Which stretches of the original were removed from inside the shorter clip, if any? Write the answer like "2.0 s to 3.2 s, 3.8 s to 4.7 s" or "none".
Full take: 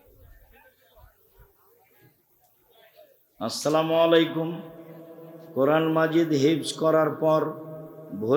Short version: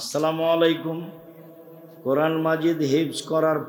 none